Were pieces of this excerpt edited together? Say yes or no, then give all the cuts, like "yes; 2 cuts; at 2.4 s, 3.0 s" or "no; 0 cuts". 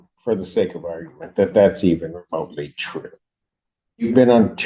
no; 0 cuts